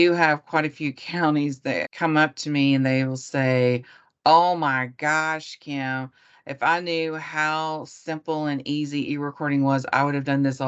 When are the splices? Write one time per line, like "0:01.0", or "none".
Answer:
0:01.9